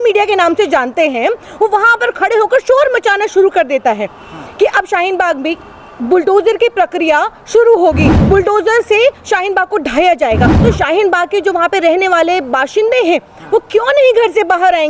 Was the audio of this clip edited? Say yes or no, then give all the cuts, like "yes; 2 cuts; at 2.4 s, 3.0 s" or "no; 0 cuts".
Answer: yes; 1 cut; at 10.5 s